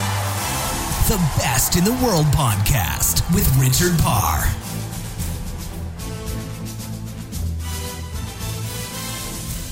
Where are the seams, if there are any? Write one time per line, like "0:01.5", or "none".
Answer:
0:08.5